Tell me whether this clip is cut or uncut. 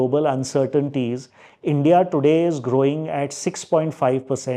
uncut